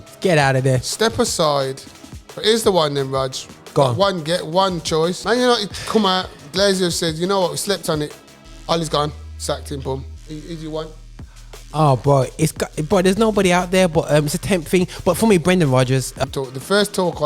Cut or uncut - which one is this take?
cut